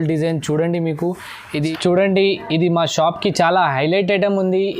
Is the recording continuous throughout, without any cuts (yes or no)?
no